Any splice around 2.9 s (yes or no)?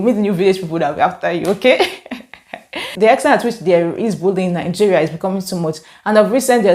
yes